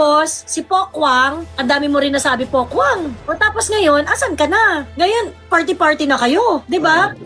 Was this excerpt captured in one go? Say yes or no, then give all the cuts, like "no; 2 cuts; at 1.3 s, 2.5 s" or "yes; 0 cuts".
no; 2 cuts; at 3.2 s, 4.9 s